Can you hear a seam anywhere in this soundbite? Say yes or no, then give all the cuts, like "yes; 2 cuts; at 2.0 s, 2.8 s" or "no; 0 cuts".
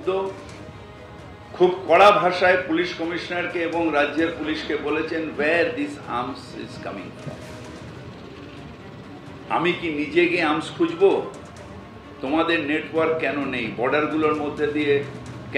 no; 0 cuts